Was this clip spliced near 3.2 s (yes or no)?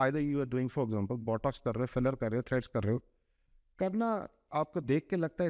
no